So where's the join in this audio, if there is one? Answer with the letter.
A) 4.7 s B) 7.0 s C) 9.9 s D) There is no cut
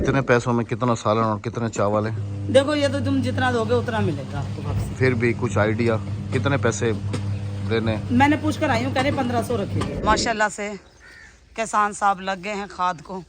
C